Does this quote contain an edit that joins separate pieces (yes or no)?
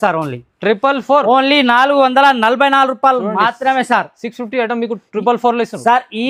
no